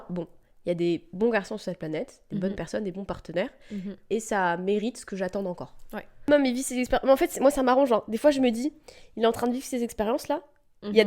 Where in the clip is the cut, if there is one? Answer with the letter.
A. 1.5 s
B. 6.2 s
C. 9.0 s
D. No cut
B